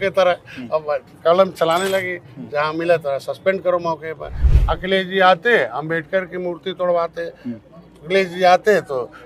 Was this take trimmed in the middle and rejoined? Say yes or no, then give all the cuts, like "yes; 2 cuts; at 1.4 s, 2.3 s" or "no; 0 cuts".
yes; 1 cut; at 4.4 s